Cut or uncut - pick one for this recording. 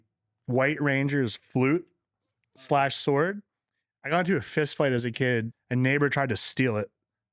cut